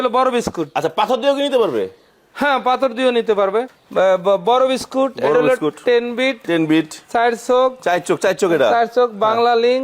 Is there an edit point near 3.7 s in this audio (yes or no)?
yes